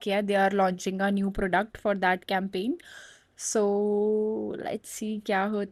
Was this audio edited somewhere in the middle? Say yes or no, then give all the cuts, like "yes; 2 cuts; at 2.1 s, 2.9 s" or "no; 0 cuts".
no; 0 cuts